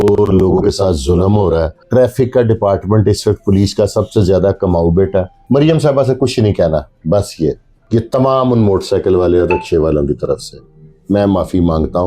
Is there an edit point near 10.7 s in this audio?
no; 3 cuts; at 1.8 s, 5.4 s, 7.7 s

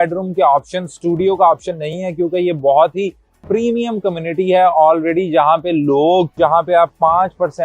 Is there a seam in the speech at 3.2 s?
no; 1 cut; at 6.3 s

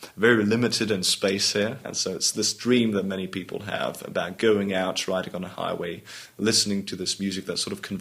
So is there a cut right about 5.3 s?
no; 1 cut; at 1.9 s

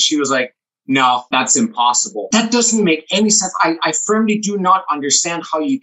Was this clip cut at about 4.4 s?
no; 2 cuts; at 1.2 s, 2.3 s

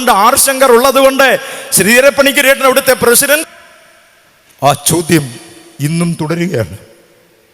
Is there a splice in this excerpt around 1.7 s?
no; 1 cut; at 3.4 s

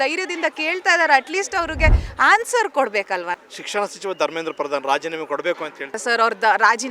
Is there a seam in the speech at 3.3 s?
yes; 2 cuts; at 3.3 s, 6.0 s

